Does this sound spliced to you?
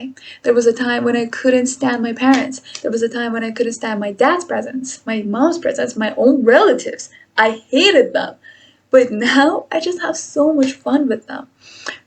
no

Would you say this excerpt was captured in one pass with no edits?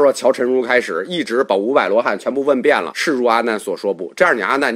no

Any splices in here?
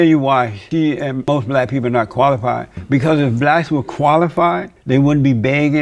yes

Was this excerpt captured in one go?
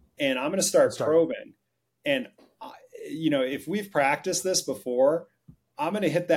yes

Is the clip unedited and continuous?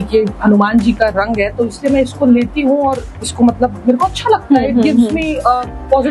yes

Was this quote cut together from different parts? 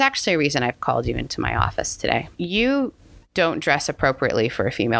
yes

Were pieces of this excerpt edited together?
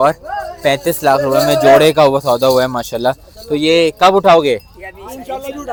no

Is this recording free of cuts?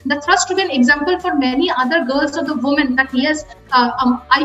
yes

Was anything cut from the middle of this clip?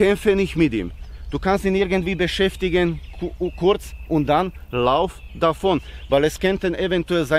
no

